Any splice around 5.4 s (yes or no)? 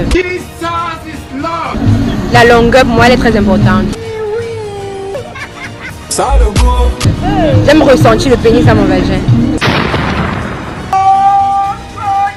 no